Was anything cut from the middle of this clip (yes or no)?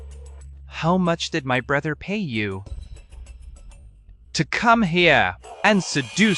no